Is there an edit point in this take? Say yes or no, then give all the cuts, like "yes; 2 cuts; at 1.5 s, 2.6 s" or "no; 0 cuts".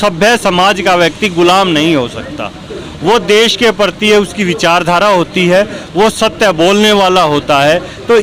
no; 0 cuts